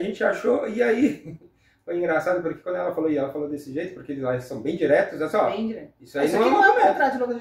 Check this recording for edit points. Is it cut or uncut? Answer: uncut